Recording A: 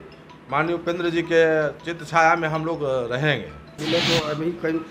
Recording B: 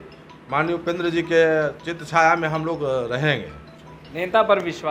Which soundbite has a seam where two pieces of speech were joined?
A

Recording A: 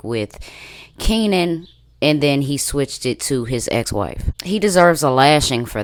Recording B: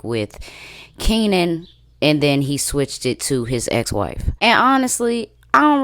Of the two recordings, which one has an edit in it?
B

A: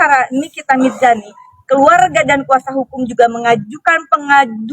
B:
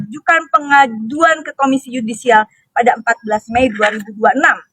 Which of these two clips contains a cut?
A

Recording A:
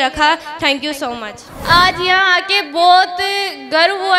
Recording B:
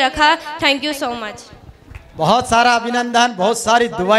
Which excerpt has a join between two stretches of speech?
A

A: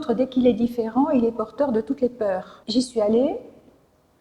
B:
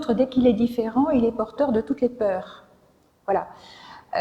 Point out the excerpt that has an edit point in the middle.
A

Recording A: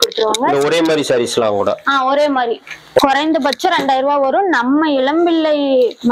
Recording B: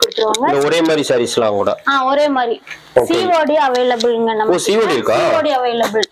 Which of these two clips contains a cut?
A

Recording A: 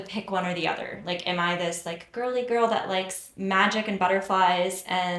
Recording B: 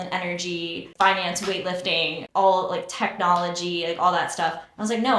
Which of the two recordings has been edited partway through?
B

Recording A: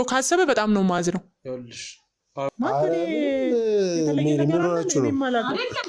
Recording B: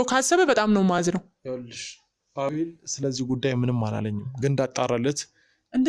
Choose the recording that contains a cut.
A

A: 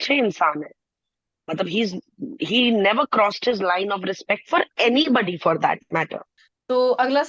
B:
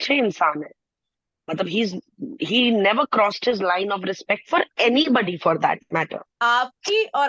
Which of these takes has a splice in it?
B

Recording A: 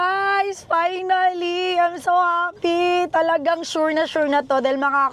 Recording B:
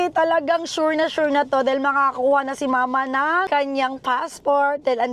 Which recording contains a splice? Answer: B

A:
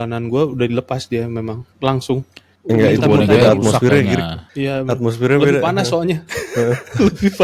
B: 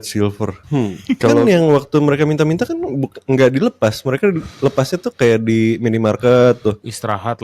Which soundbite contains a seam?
B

